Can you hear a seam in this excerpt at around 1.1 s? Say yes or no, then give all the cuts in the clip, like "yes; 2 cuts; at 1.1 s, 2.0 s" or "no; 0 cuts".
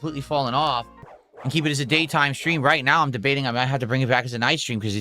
yes; 1 cut; at 1.1 s